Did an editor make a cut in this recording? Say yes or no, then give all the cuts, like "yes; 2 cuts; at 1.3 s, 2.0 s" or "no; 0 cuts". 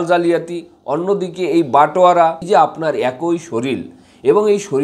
yes; 1 cut; at 2.4 s